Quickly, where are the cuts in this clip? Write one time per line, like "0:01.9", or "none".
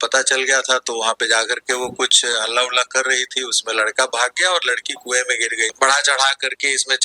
0:05.7